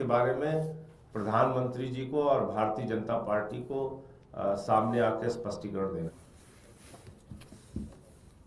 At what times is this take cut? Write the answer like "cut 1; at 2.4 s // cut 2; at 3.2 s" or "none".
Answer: cut 1; at 6.1 s